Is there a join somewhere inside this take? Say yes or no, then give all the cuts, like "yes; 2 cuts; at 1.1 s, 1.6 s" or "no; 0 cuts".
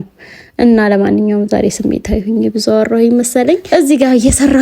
yes; 1 cut; at 3.6 s